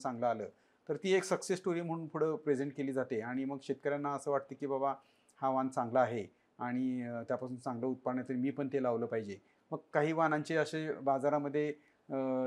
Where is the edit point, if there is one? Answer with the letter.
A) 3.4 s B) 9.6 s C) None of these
C